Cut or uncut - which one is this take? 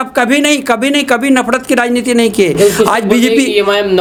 uncut